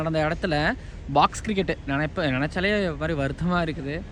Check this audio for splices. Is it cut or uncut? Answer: uncut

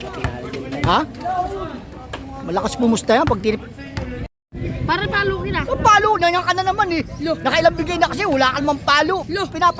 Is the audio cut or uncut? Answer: cut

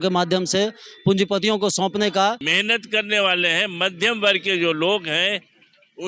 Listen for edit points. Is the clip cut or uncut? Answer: cut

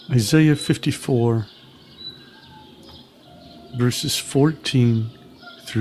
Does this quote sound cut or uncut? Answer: uncut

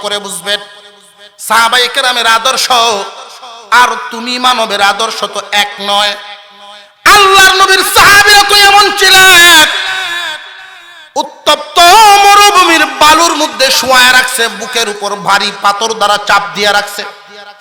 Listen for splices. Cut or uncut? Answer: uncut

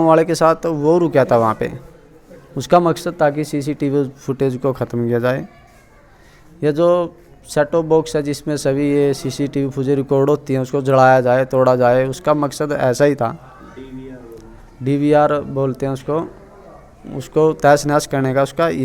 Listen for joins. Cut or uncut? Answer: uncut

